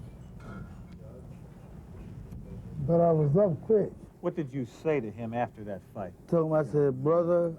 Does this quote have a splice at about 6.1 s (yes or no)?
no